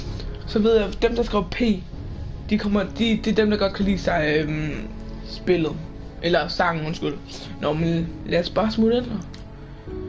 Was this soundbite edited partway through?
yes; 1 cut; at 7.8 s

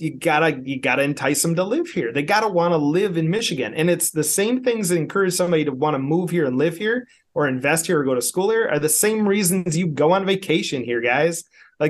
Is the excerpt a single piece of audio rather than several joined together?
yes; 0 cuts

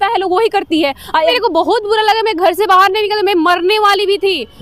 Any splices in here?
yes; 1 cut; at 1.3 s

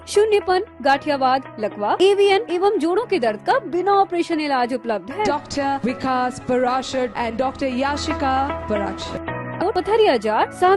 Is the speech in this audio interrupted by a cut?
yes; 1 cut; at 9.6 s

